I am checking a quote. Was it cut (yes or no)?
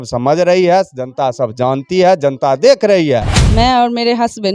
yes